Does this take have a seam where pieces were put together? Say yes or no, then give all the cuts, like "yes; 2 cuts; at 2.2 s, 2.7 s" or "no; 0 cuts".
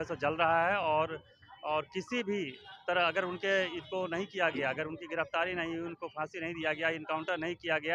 no; 0 cuts